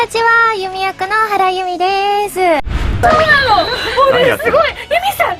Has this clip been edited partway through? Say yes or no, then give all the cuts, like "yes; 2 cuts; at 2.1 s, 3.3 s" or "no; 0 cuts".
yes; 1 cut; at 2.8 s